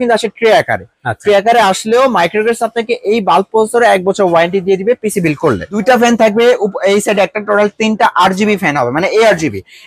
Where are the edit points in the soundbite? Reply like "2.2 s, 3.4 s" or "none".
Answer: 5.7 s